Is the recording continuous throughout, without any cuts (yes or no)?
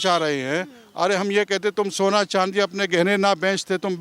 yes